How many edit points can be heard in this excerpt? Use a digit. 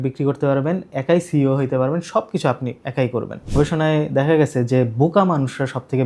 1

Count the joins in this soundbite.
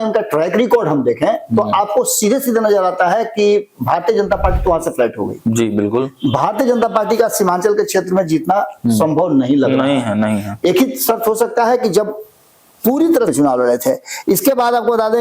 1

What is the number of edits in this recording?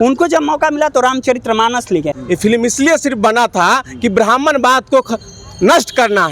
1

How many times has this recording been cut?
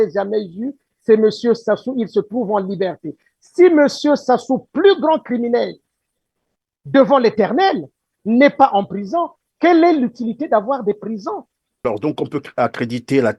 1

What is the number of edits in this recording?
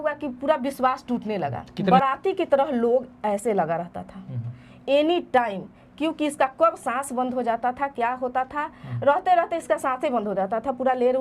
1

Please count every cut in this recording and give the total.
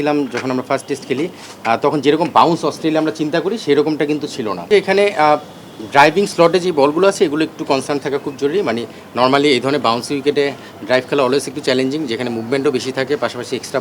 1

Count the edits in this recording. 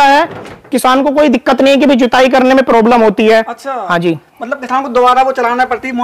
0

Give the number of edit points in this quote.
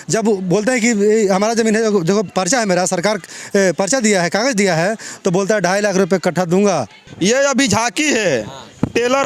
1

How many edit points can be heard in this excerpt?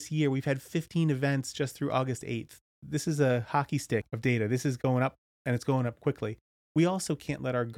3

